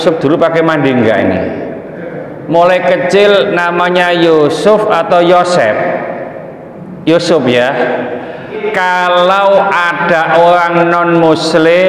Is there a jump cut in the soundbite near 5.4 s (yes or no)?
no